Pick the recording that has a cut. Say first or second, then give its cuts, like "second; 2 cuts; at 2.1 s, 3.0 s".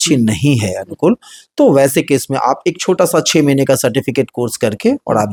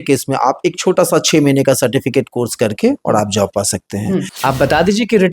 second; 1 cut; at 4.3 s